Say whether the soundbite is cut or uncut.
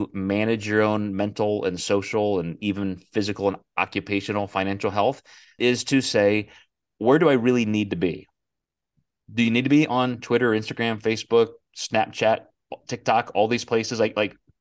cut